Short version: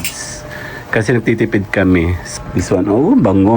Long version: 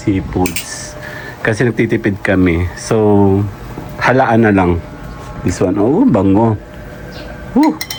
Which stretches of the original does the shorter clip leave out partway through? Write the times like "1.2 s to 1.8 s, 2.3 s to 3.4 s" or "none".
2.7 s to 5.1 s